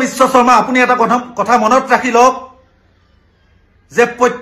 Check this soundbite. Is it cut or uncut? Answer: uncut